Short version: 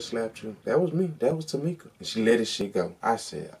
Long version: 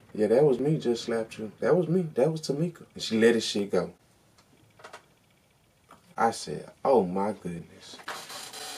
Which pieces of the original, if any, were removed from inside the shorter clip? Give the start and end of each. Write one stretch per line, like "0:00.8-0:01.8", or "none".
0:03.5-0:05.7